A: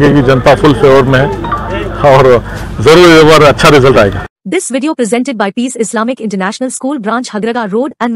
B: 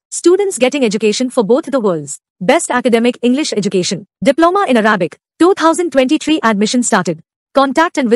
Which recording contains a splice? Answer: A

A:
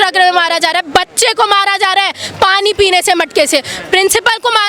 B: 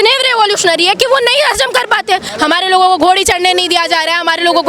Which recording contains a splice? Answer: B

